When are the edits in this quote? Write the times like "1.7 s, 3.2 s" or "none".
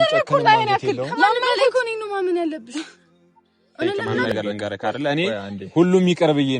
4.1 s